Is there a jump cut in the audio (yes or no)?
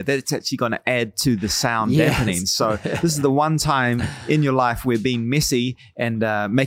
no